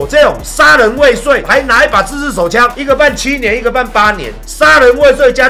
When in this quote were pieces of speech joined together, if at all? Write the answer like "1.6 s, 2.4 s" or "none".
none